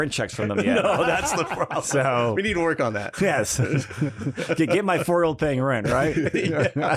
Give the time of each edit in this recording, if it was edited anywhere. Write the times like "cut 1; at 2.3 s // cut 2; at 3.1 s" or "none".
none